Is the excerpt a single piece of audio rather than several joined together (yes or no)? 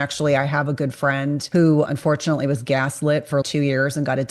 no